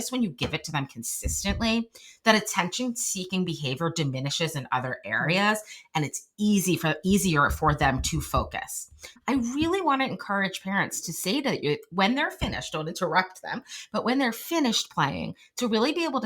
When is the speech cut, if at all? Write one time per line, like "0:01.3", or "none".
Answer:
0:09.2